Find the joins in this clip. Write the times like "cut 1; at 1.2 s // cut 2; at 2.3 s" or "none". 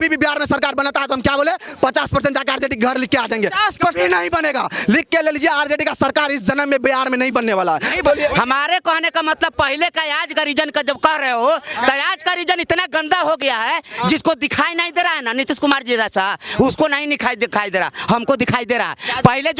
cut 1; at 8.0 s